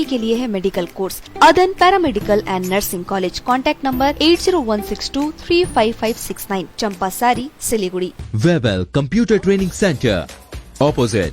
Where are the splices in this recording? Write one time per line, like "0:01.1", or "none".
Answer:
0:01.2
0:08.2